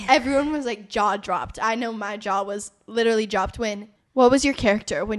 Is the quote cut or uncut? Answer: cut